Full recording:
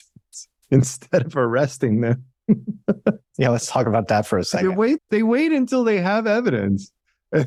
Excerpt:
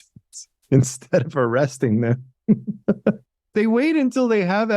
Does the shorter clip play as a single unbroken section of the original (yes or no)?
no